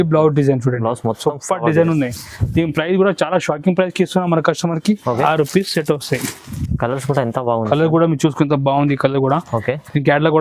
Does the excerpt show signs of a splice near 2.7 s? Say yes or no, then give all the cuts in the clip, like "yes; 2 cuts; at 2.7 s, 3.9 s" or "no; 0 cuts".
no; 2 cuts; at 5.2 s, 6.6 s